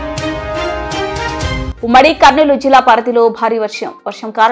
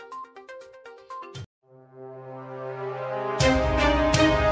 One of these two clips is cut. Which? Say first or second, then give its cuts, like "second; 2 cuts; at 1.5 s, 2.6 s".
first; 1 cut; at 1.7 s